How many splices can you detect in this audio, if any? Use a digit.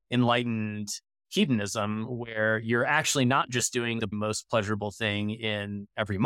1